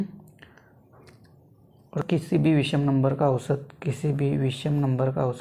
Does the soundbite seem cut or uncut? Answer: cut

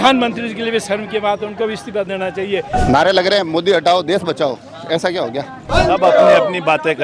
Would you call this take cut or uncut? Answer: cut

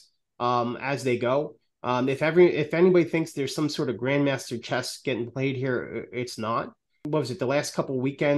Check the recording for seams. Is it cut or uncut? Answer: cut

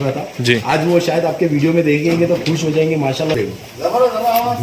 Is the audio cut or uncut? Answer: cut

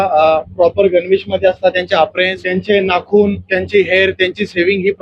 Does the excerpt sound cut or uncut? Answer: cut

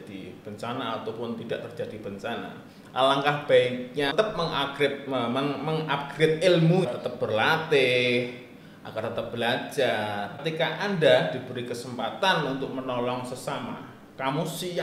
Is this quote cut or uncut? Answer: cut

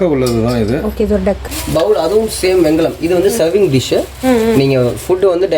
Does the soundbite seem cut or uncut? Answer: cut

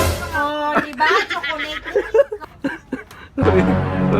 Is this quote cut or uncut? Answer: cut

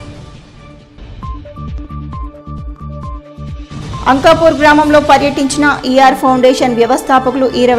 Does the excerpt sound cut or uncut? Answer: cut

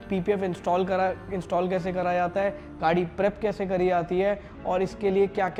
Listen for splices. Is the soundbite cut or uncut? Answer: uncut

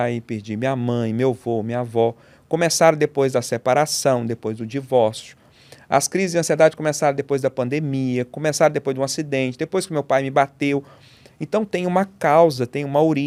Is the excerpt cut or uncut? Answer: uncut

